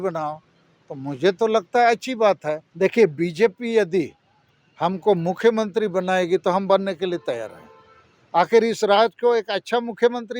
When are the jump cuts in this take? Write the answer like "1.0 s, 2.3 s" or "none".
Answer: 2.7 s